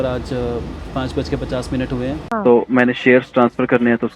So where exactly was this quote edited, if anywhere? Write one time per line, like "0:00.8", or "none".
0:02.2